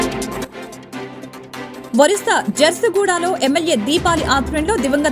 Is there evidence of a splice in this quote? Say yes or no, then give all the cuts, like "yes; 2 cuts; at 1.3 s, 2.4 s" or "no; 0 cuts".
yes; 1 cut; at 1.9 s